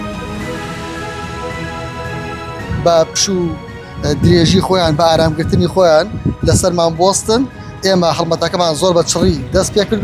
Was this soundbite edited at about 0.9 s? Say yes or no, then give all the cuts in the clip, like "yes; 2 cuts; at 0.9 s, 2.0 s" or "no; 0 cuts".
no; 1 cut; at 2.2 s